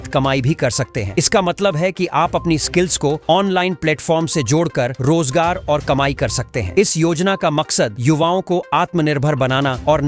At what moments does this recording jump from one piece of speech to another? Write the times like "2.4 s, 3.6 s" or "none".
none